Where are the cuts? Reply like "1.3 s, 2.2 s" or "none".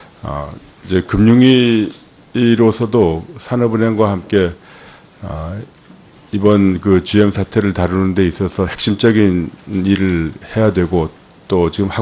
none